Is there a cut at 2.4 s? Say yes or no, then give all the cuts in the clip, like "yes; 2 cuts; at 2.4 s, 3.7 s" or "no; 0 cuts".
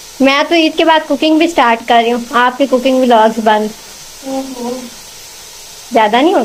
no; 0 cuts